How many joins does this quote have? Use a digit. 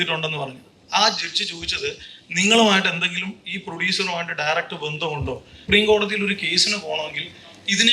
1